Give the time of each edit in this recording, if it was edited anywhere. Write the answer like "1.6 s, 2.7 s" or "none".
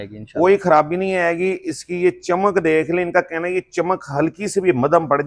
none